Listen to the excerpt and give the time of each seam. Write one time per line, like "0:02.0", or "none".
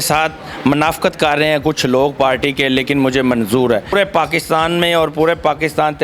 0:03.9